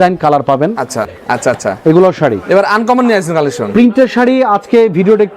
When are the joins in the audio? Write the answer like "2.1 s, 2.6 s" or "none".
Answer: 1.1 s